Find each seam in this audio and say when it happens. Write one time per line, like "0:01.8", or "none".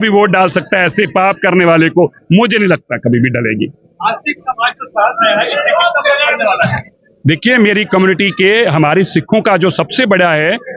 none